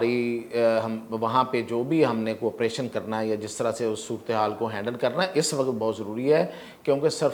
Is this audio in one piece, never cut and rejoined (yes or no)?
yes